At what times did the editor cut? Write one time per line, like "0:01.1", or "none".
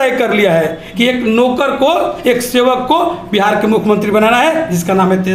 none